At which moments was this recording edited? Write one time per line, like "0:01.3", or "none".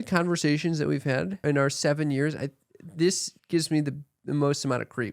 0:01.4
0:03.3